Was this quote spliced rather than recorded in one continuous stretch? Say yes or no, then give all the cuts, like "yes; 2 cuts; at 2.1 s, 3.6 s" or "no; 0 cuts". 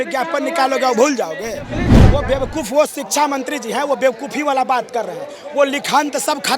yes; 1 cut; at 1.9 s